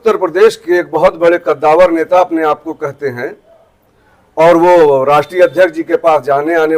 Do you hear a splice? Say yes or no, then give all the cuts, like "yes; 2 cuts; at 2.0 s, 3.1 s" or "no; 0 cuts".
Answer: no; 0 cuts